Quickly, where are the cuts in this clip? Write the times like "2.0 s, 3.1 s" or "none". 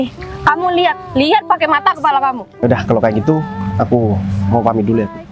2.6 s